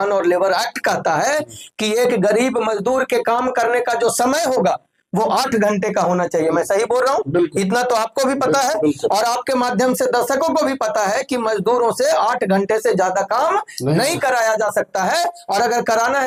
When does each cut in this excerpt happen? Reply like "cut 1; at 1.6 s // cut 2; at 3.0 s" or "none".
none